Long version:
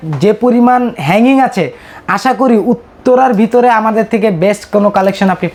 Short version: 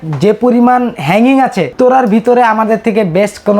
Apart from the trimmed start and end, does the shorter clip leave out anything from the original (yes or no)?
yes